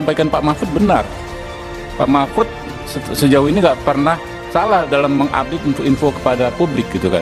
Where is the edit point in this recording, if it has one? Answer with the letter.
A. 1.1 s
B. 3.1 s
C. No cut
B